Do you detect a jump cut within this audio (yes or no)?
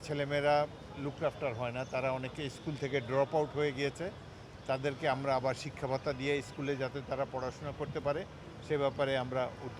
no